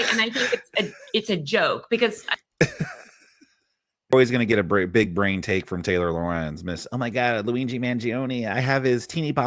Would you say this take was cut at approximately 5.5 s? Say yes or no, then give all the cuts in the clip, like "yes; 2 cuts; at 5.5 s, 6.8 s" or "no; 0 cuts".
no; 1 cut; at 4.1 s